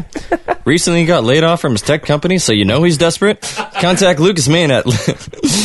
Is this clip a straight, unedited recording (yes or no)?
no